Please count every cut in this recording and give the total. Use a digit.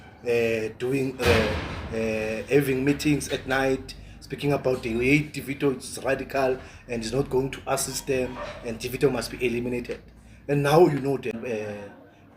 1